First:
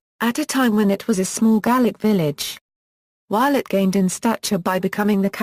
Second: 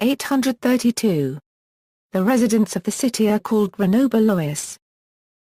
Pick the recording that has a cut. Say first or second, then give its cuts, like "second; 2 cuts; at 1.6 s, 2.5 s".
second; 1 cut; at 2.0 s